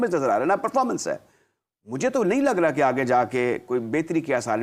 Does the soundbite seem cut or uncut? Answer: uncut